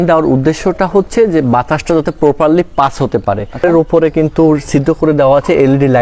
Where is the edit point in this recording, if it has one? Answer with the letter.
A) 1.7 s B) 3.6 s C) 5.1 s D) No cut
B